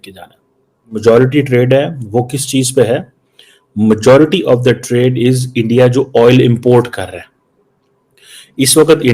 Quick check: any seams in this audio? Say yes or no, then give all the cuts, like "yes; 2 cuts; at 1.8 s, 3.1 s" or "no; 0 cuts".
yes; 1 cut; at 1.0 s